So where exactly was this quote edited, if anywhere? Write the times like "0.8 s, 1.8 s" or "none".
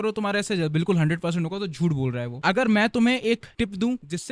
2.4 s